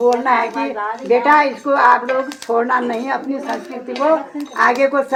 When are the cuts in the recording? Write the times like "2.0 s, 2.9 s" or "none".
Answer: none